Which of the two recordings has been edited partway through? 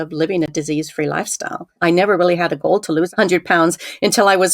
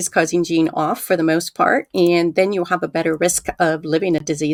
first; 2 cuts; at 1.8 s, 3.1 s

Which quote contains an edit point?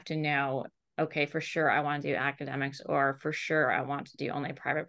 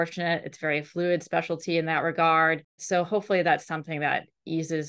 second; 1 cut; at 2.7 s

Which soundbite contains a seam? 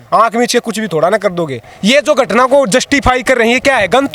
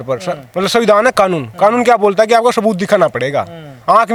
first; 1 cut; at 1.6 s

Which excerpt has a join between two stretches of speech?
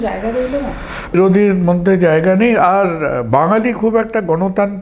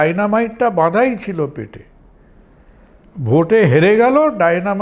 first; 1 cut; at 1.1 s

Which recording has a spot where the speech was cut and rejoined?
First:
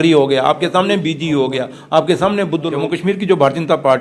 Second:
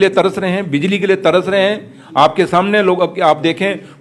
first; 1 cut; at 2.7 s

